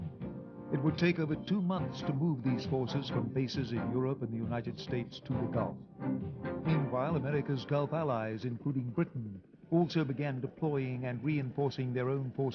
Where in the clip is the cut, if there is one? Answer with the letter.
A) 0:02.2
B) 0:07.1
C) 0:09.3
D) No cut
B